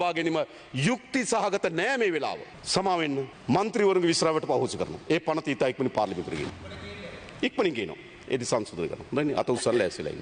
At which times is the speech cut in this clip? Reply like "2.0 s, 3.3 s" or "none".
2.5 s, 3.3 s, 6.5 s